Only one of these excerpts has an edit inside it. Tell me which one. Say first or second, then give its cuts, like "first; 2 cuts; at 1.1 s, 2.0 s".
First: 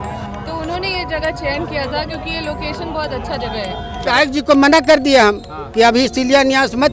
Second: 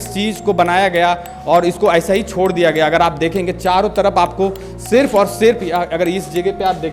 first; 1 cut; at 4.0 s